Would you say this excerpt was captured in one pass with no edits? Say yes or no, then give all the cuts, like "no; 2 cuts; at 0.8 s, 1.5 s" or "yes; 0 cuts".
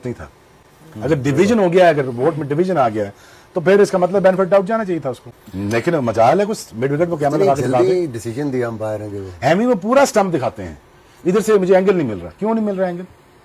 yes; 0 cuts